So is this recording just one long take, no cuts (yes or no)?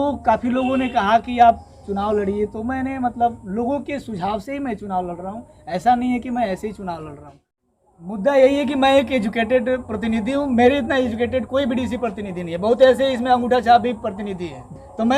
no